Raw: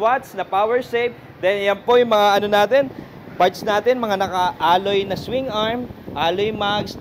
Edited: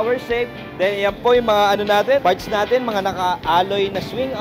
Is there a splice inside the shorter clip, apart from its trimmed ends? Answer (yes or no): yes